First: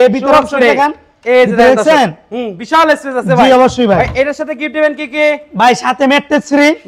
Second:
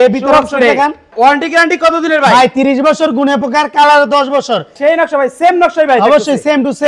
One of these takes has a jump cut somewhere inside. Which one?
second; 2 cuts; at 1.1 s, 4.7 s

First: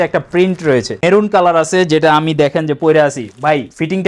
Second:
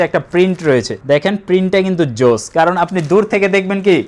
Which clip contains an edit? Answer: first; 1 cut; at 0.9 s

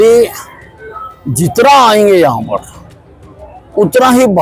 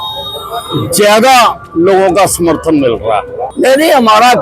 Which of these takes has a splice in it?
second; 1 cut; at 3.4 s

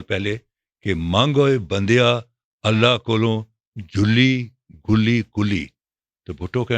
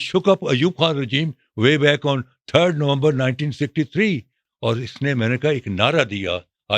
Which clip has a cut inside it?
second; 1 cut; at 4.3 s

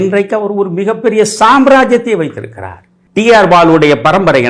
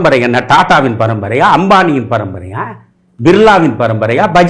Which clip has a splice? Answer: first; 1 cut; at 2.9 s

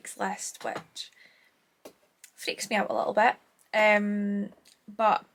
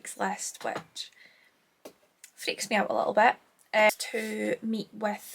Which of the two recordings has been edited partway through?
second; 1 cut; at 3.9 s

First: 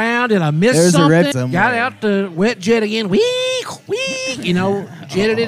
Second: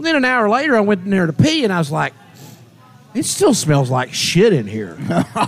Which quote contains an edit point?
first; 1 cut; at 1.3 s

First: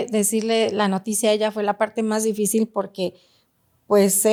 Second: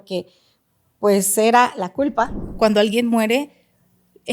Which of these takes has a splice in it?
second; 1 cut; at 2.4 s

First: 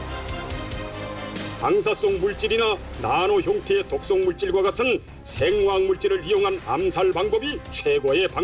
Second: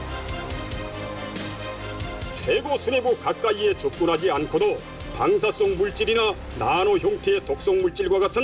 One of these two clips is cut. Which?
first; 1 cut; at 1.4 s

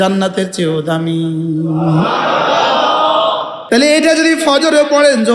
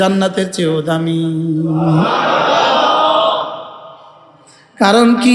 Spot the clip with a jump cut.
first; 1 cut; at 3.6 s

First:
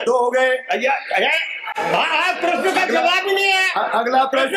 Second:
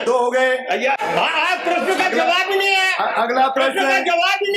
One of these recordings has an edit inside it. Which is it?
second; 1 cut; at 1.0 s

